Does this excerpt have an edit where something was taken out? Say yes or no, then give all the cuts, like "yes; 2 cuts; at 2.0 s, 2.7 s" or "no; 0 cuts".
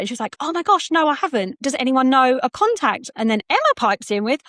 yes; 1 cut; at 1.6 s